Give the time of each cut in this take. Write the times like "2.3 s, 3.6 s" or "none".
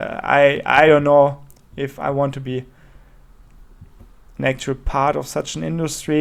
none